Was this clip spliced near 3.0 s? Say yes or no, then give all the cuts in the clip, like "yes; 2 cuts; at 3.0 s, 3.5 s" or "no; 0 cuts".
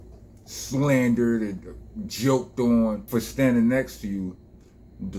yes; 1 cut; at 3.0 s